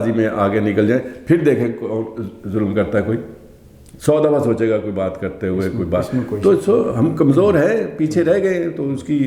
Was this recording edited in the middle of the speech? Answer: no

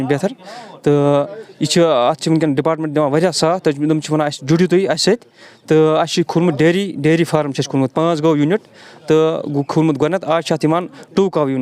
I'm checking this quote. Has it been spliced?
no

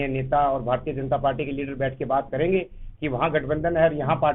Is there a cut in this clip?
no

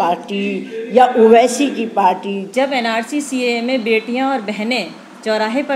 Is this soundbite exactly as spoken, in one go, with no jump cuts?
no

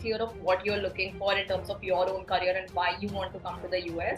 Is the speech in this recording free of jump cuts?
yes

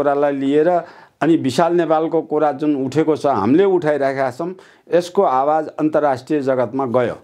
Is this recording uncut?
yes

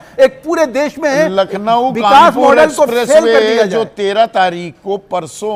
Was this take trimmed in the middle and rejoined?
no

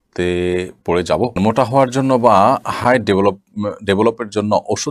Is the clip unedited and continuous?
no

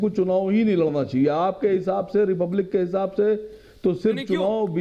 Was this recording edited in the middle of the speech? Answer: no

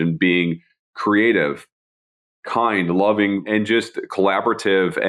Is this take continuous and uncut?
no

